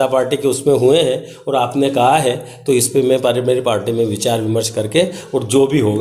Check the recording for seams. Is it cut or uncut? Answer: uncut